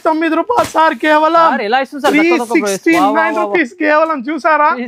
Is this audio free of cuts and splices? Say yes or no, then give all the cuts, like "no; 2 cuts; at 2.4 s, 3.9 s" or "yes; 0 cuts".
yes; 0 cuts